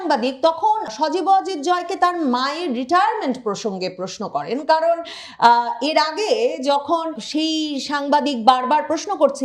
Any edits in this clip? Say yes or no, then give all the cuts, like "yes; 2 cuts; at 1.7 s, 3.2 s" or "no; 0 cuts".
yes; 2 cuts; at 0.9 s, 7.2 s